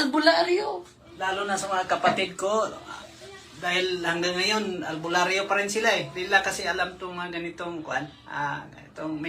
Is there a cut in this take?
yes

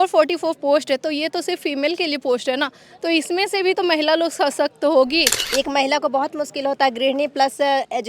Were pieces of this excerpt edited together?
yes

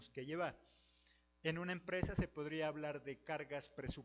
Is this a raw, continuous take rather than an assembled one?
no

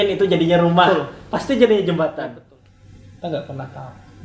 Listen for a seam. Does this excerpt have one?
yes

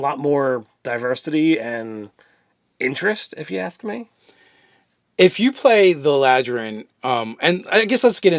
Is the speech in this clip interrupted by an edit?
yes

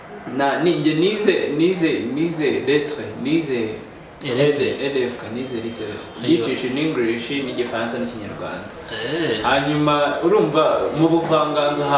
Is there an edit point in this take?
no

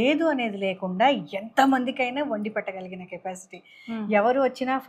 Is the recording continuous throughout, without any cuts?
yes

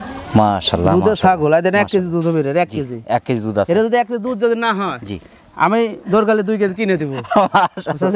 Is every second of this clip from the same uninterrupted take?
yes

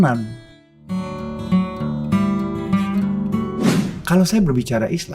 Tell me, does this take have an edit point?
yes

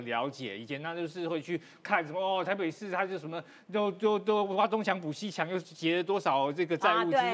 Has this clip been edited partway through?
no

